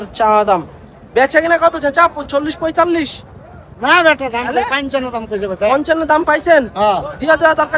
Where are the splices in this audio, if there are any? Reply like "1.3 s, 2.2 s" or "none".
none